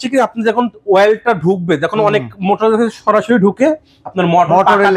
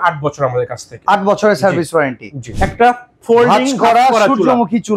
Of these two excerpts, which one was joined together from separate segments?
second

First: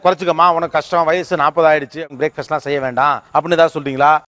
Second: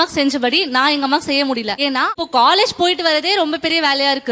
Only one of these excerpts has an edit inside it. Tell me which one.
second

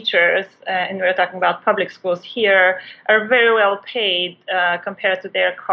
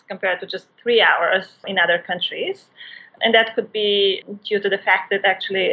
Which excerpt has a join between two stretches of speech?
second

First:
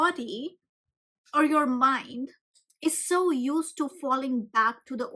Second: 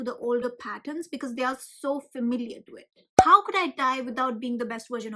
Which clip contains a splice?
second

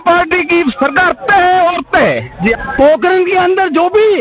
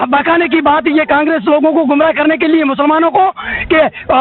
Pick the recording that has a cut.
first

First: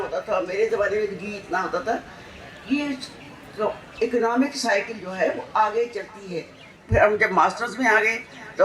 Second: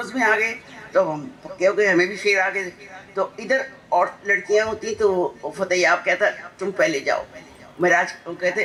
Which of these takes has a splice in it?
first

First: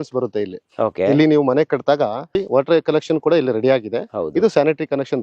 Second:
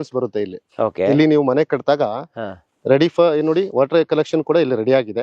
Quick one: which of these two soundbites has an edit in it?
first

